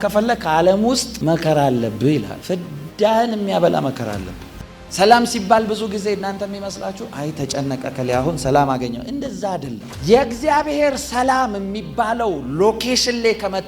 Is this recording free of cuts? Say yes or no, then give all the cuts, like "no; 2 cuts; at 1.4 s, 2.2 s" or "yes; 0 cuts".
no; 1 cut; at 4.5 s